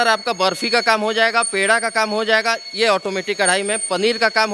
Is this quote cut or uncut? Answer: uncut